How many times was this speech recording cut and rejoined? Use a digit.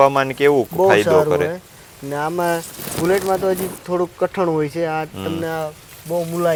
0